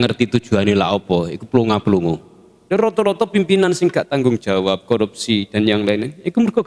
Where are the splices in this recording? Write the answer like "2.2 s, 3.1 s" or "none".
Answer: 2.5 s